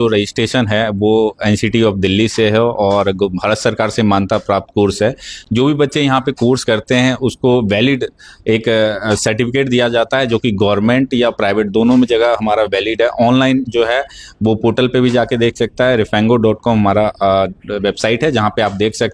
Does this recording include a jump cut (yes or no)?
no